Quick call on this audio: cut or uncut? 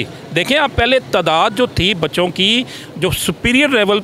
uncut